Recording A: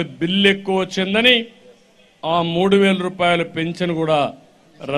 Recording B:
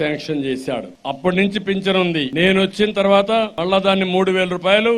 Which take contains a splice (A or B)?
B